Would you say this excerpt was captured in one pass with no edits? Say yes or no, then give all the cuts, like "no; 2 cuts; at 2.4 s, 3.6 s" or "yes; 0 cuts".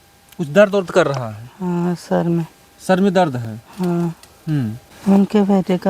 no; 1 cut; at 4.9 s